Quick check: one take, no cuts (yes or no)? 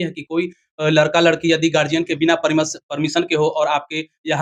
yes